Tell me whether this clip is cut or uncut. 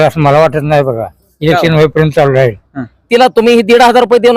cut